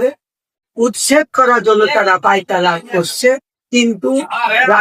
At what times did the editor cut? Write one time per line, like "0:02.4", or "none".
none